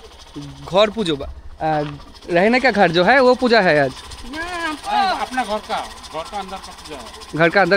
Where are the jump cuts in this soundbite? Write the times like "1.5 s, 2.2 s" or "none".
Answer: none